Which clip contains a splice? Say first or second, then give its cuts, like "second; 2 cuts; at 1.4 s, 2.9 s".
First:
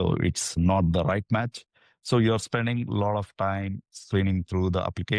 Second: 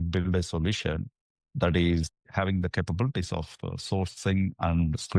second; 1 cut; at 2.2 s